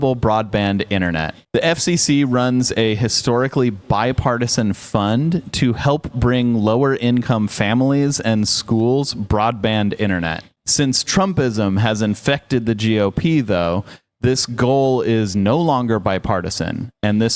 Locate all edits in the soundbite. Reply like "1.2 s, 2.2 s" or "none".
none